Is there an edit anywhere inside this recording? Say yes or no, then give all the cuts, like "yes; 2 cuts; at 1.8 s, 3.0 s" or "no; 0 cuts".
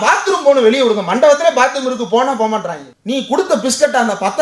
yes; 1 cut; at 2.9 s